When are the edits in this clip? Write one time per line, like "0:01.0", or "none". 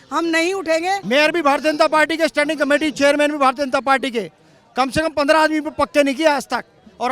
0:01.0